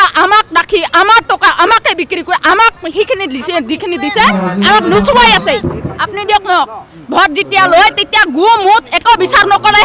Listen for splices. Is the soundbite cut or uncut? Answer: cut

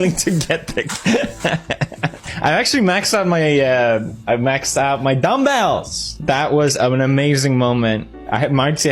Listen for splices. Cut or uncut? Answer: cut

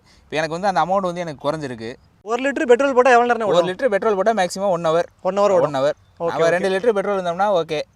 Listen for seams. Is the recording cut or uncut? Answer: uncut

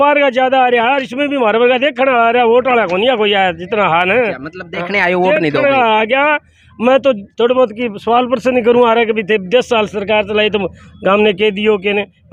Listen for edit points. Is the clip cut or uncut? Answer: uncut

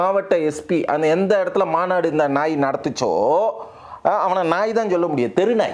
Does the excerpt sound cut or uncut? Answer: uncut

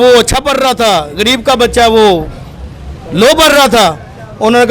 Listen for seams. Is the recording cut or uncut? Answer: uncut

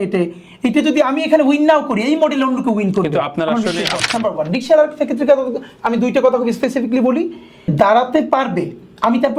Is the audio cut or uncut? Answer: cut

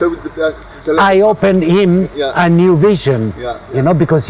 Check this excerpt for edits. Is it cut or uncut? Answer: uncut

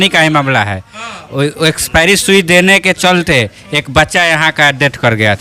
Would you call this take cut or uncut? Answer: uncut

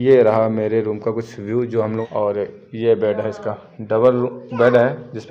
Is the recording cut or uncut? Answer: cut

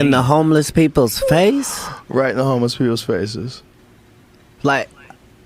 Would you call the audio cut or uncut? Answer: uncut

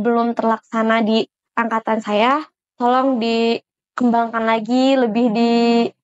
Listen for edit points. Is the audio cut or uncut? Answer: uncut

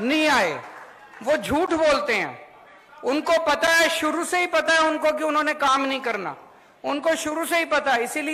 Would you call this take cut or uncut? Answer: uncut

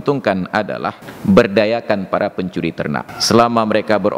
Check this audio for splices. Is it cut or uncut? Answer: cut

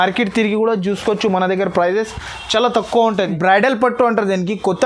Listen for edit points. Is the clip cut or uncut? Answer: cut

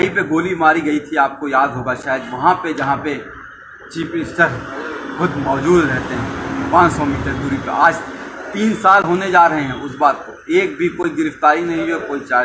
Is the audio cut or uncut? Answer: uncut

